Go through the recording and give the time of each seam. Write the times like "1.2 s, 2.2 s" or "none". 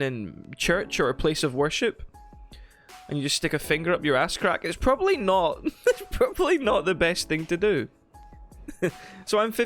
none